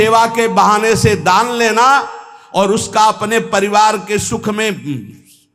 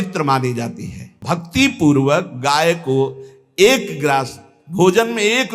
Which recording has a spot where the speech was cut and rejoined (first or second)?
second